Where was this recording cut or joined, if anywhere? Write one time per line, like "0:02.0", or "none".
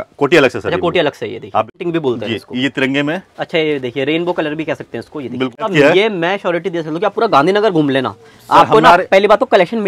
0:01.8
0:05.7